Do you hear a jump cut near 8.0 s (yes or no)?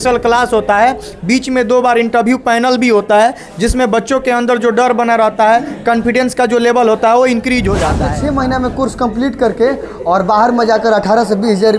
yes